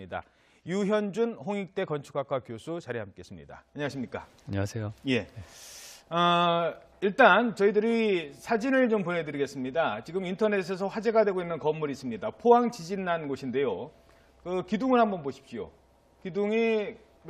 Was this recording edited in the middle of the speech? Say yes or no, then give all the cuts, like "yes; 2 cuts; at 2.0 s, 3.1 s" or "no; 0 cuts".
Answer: no; 0 cuts